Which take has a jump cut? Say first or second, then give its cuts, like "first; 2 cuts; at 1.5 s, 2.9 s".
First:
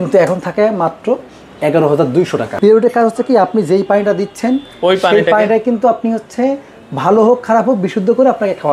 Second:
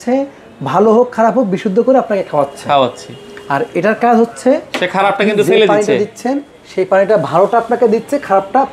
first; 1 cut; at 2.6 s